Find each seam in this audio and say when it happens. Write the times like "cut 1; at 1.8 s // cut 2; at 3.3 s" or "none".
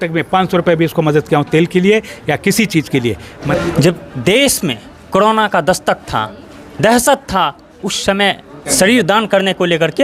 cut 1; at 3.3 s // cut 2; at 8.6 s